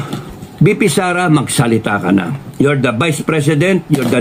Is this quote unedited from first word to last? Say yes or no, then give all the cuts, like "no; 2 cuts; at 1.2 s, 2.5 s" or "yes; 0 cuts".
yes; 0 cuts